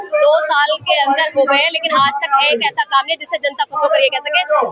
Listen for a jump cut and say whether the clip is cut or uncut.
uncut